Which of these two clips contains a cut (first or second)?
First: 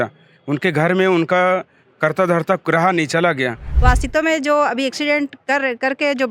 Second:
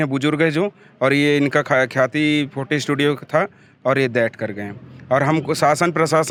first